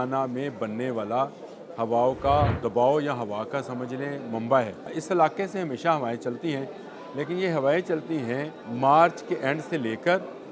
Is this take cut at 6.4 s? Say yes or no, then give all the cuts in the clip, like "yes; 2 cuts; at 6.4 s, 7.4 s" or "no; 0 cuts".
no; 3 cuts; at 2.6 s, 5.0 s, 8.6 s